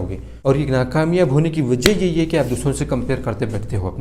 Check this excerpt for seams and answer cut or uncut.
uncut